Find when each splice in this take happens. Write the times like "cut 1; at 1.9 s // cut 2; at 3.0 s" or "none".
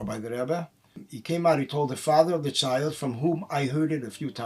cut 1; at 1.1 s